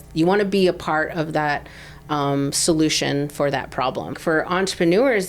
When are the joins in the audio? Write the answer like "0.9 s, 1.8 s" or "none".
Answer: 4.2 s